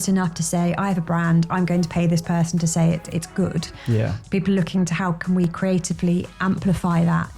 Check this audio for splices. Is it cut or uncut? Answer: uncut